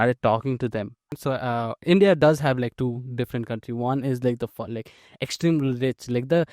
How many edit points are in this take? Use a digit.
1